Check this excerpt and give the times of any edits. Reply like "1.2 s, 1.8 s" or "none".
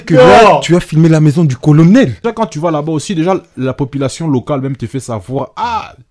2.2 s